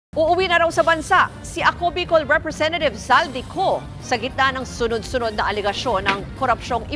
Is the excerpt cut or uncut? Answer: uncut